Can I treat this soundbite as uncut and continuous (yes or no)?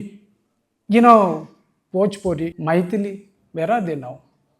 no